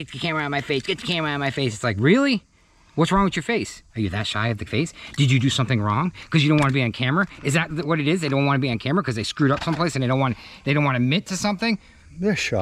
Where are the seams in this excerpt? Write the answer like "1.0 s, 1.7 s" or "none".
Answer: none